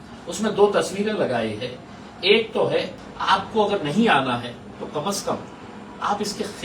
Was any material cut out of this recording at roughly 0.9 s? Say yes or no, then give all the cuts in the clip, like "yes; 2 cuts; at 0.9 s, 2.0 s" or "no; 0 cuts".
no; 1 cut; at 3.0 s